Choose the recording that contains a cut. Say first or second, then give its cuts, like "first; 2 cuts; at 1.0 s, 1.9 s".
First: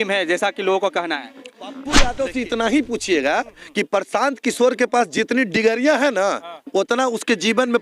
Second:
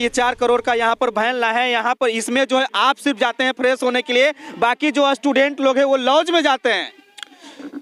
first; 1 cut; at 1.8 s